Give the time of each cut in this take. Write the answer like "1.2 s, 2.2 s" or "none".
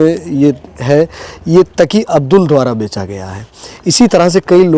none